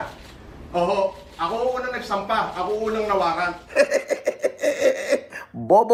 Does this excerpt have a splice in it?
no; 0 cuts

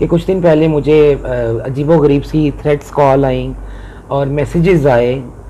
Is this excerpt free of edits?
yes; 0 cuts

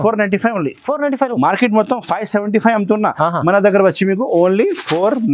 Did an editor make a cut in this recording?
no; 0 cuts

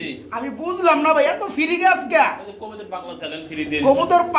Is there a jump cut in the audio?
no; 0 cuts

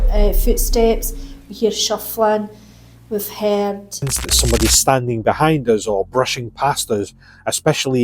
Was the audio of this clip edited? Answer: yes; 1 cut; at 4.2 s

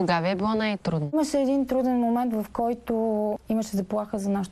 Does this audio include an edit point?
no; 0 cuts

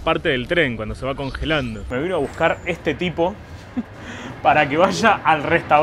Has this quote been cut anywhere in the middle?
yes; 1 cut; at 1.8 s

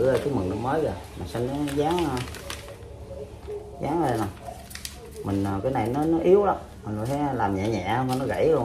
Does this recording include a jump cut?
no; 0 cuts

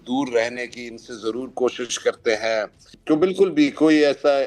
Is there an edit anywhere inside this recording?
yes; 1 cut; at 2.9 s

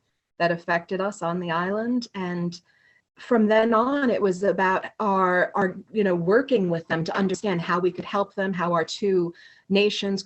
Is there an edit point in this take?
yes; 1 cut; at 3.0 s

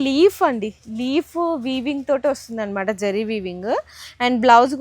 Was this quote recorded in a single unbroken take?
yes; 0 cuts

